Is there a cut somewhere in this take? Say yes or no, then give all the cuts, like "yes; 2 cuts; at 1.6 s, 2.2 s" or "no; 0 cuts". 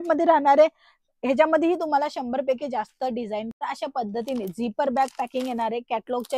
yes; 1 cut; at 3.5 s